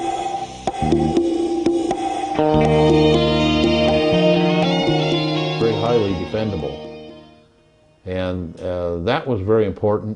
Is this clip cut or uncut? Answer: cut